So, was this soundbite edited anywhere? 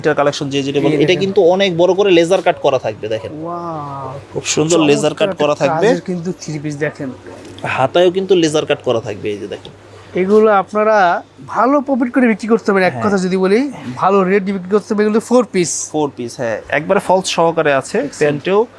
no; 0 cuts

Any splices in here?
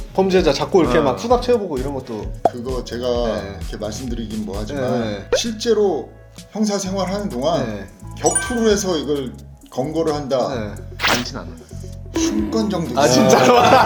no; 0 cuts

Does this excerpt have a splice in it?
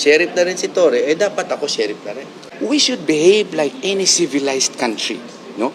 yes; 1 cut; at 2.4 s

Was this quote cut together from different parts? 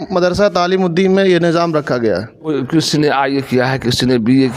yes; 1 cut; at 2.5 s

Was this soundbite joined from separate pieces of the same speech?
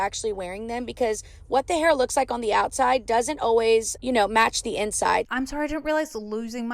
yes; 2 cuts; at 3.9 s, 5.2 s

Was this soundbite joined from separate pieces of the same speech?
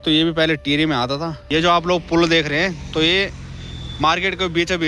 yes; 1 cut; at 1.4 s

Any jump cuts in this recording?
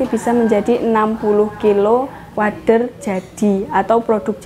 no; 0 cuts

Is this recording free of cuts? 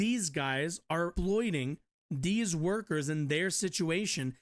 no; 1 cut; at 1.1 s

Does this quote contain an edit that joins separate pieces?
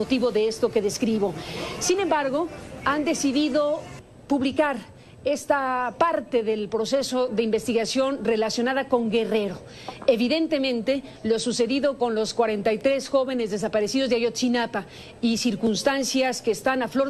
yes; 1 cut; at 12.8 s

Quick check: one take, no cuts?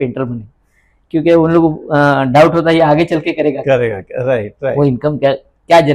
yes; 0 cuts

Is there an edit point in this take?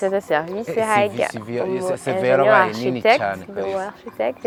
no; 0 cuts

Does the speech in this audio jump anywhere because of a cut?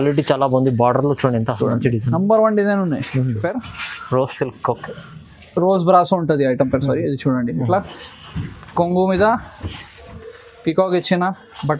yes; 1 cut; at 3.4 s

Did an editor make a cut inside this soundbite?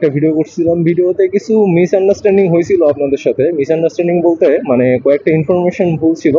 no; 0 cuts

